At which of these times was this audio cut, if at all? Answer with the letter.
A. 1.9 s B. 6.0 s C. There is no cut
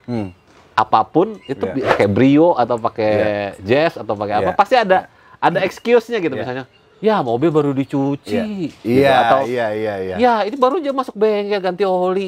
A